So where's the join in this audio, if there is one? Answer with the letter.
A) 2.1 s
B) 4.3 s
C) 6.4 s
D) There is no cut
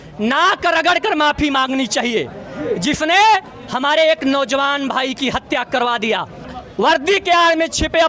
C